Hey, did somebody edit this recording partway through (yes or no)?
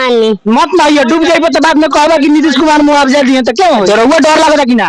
yes